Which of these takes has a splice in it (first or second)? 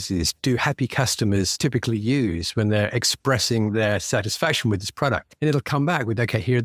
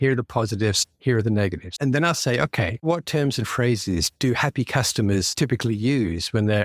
second